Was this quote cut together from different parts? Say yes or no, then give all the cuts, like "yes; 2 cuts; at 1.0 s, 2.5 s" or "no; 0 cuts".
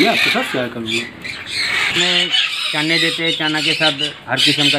yes; 1 cut; at 2.0 s